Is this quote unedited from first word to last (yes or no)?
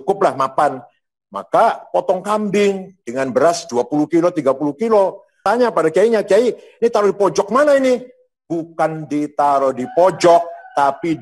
no